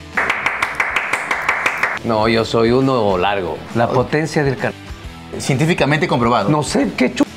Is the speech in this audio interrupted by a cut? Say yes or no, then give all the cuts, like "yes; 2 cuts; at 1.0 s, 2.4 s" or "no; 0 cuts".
yes; 3 cuts; at 1.9 s, 3.6 s, 5.3 s